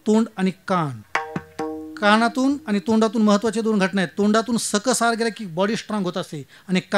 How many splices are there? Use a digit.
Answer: 1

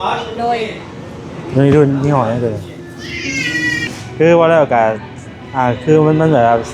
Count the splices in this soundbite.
1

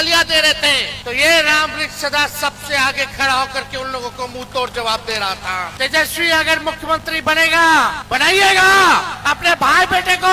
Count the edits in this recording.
4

